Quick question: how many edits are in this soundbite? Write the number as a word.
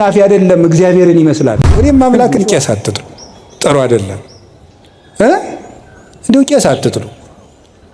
one